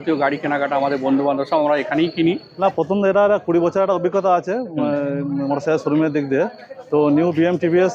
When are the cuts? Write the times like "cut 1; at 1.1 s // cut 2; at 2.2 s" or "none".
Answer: cut 1; at 2.5 s